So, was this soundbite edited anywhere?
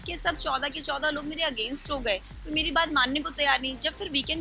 no; 0 cuts

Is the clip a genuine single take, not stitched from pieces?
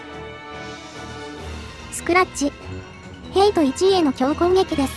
no; 1 cut; at 2.1 s

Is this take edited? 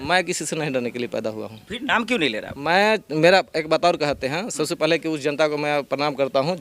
no; 0 cuts

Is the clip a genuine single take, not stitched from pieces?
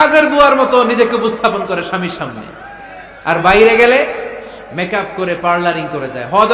yes; 0 cuts

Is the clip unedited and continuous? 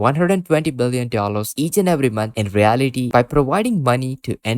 no; 1 cut; at 3.1 s

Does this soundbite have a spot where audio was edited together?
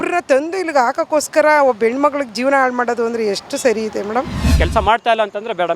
yes; 1 cut; at 4.6 s

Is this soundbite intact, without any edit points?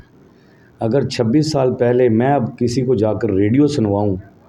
yes; 0 cuts

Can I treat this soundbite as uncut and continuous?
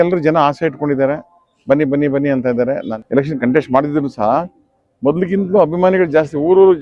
no; 1 cut; at 2.9 s

